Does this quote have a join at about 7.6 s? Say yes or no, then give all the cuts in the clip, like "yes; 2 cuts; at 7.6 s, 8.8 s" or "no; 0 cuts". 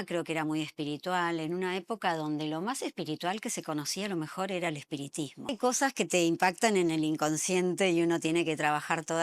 no; 1 cut; at 5.5 s